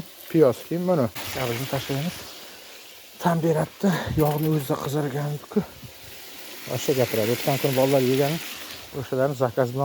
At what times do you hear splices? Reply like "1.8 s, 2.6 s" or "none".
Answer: 1.3 s